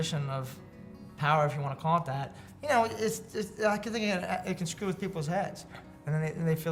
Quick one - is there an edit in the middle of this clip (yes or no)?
no